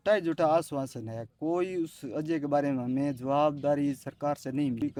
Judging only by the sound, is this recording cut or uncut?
uncut